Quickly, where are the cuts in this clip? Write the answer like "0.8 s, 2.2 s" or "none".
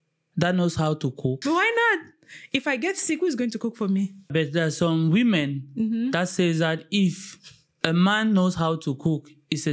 1.4 s, 4.3 s

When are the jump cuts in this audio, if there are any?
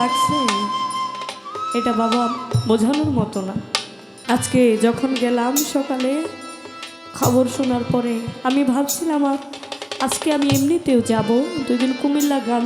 4.1 s

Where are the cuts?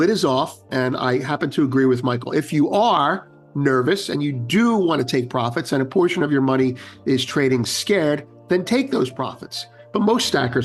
none

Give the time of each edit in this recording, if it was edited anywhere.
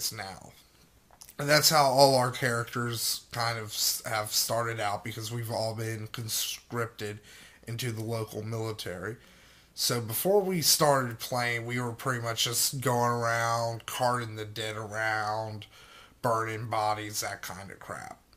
12.7 s

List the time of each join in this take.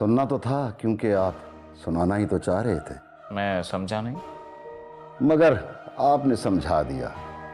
none

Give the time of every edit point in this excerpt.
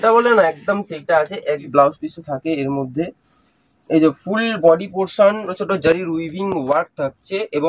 1.6 s, 5.4 s

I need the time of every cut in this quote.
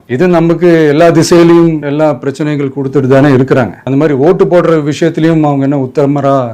3.8 s

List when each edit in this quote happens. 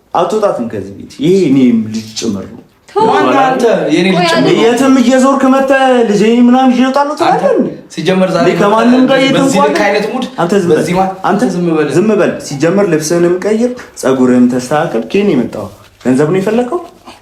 none

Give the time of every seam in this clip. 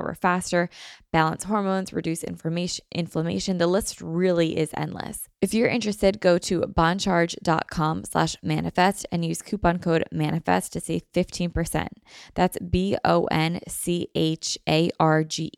5.2 s

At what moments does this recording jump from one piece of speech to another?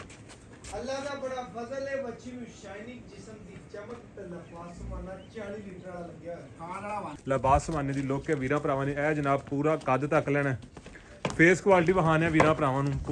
7.1 s

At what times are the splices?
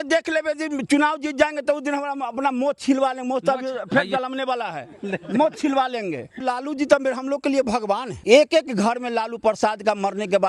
6.4 s, 8.1 s

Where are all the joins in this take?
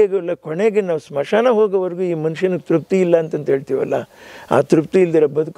none

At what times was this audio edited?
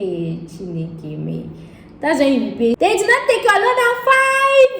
2.8 s

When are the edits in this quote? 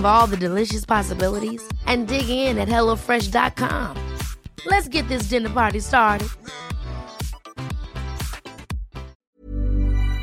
9.1 s

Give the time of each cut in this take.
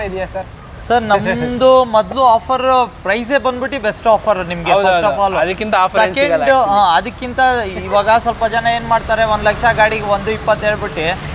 none

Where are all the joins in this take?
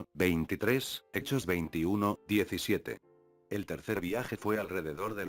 none

